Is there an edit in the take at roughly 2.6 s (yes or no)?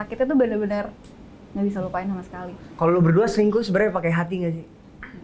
yes